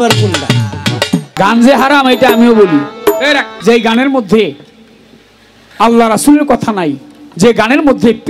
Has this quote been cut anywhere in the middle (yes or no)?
yes